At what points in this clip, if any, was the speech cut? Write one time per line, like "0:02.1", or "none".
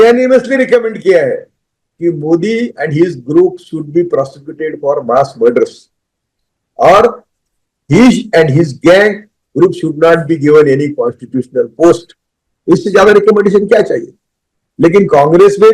none